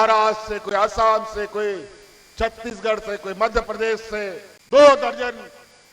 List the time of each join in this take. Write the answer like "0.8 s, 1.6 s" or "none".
4.5 s